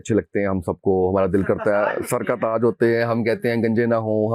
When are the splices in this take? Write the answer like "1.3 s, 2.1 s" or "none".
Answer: none